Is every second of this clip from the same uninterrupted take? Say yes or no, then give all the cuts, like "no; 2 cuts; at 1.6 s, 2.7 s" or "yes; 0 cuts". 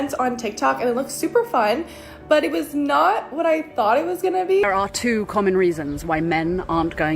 no; 1 cut; at 4.7 s